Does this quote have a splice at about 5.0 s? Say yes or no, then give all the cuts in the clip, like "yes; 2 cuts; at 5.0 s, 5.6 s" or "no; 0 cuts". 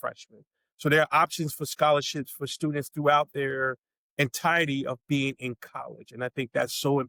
no; 0 cuts